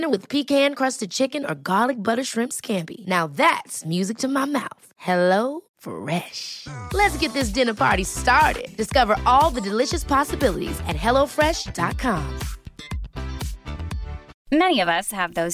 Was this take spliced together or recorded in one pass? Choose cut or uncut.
cut